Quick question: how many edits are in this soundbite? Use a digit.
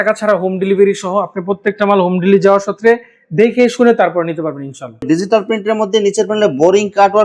1